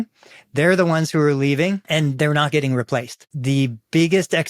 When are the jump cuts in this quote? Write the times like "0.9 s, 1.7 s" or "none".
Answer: 1.8 s, 3.3 s